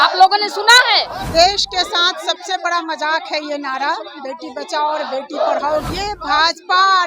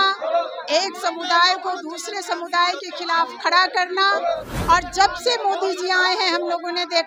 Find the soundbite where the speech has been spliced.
first; 2 cuts; at 1.2 s, 5.9 s

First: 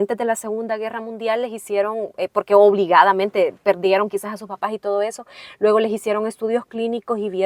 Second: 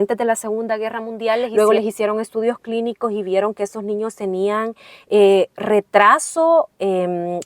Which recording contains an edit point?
second; 1 cut; at 1.5 s

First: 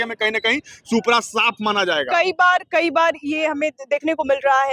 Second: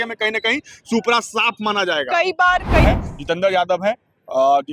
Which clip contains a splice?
second; 1 cut; at 2.8 s

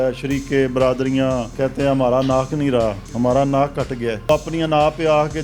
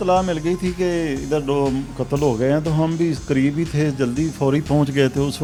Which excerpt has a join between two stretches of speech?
first; 3 cuts; at 1.5 s, 3.0 s, 4.3 s

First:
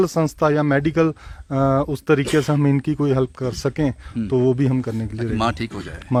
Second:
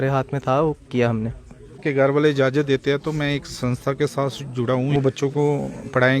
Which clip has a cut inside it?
second; 2 cuts; at 1.8 s, 4.9 s

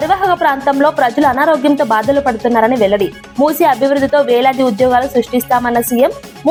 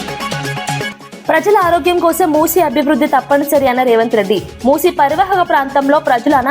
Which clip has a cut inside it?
second; 1 cut; at 0.9 s

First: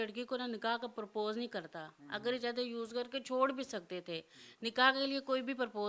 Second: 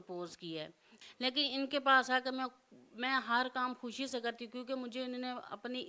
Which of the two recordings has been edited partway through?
second; 1 cut; at 1.0 s

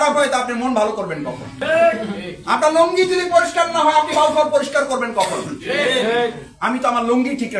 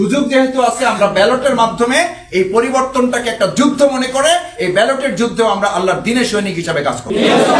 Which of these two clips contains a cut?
first; 1 cut; at 1.5 s

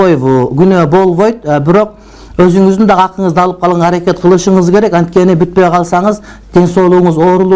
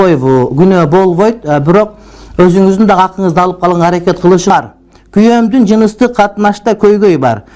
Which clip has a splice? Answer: second; 1 cut; at 4.5 s

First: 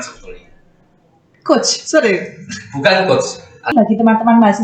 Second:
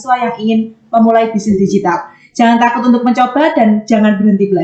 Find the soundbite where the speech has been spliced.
first; 1 cut; at 3.7 s

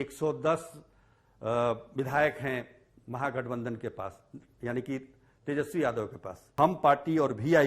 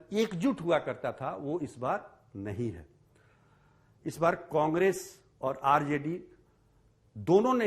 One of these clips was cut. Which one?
first; 1 cut; at 6.4 s

